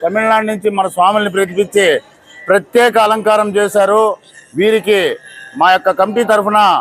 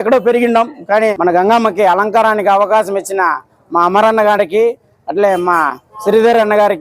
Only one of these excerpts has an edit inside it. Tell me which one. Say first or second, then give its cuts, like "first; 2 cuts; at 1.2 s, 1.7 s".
second; 1 cut; at 1.1 s